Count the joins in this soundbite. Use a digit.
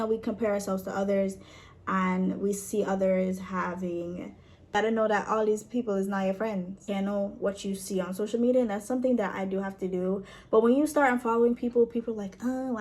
2